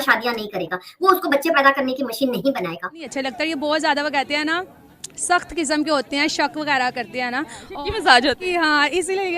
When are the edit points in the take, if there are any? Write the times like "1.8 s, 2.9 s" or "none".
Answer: 3.1 s